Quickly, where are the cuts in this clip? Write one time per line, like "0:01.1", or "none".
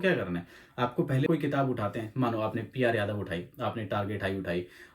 0:01.3